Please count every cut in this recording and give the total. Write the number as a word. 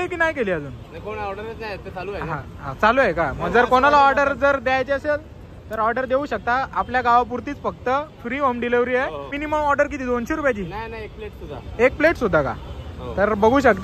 one